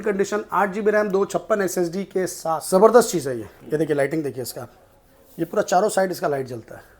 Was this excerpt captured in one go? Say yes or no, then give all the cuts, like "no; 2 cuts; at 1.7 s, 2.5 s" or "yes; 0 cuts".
no; 1 cut; at 2.5 s